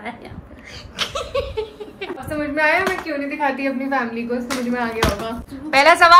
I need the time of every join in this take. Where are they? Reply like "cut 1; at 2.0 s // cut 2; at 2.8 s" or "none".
none

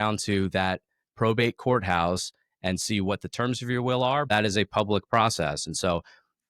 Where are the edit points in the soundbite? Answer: cut 1; at 4.3 s

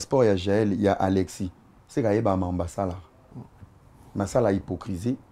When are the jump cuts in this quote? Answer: none

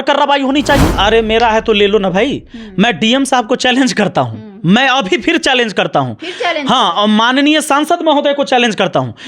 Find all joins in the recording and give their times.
cut 1; at 0.9 s

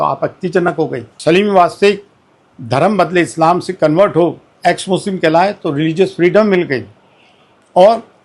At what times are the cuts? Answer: cut 1; at 1.1 s

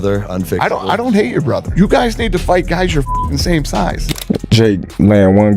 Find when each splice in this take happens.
cut 1; at 4.1 s

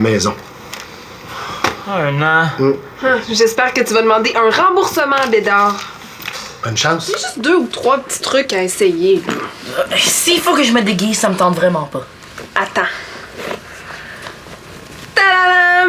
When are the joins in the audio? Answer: cut 1; at 7.3 s

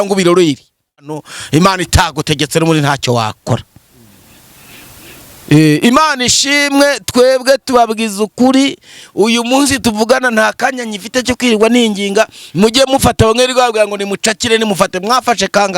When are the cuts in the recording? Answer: cut 1; at 1.3 s

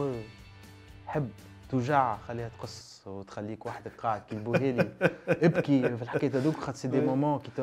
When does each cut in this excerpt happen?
none

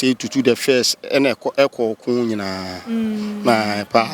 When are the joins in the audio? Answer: none

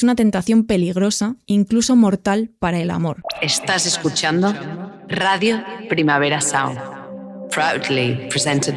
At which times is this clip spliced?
cut 1; at 3.3 s

